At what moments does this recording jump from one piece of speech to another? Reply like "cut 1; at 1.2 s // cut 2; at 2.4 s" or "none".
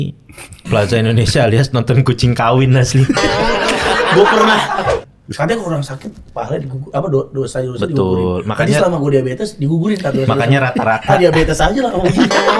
cut 1; at 4.9 s